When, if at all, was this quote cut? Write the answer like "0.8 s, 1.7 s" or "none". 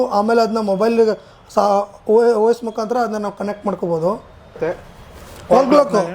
4.6 s

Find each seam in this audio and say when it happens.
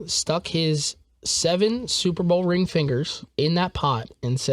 3.2 s

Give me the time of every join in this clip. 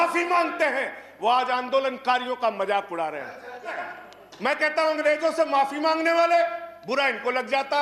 3.8 s

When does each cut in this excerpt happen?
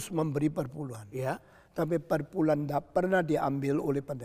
none

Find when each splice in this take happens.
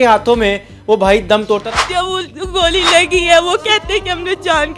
1.6 s

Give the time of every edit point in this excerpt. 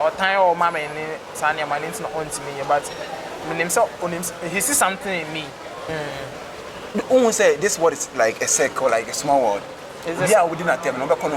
5.8 s

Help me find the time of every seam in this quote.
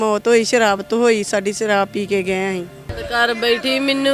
2.9 s

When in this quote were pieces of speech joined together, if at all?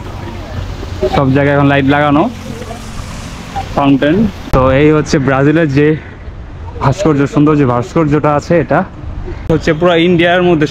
4.4 s, 9.4 s

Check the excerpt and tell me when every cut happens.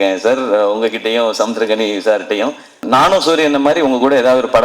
2.8 s

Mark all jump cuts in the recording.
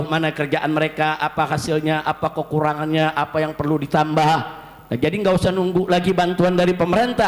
none

